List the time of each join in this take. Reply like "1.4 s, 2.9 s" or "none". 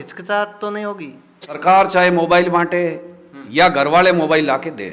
1.6 s